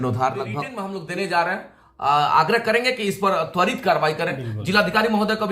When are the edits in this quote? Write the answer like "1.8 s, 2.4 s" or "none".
0.9 s